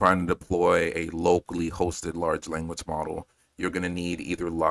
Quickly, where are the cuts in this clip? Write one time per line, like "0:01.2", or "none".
none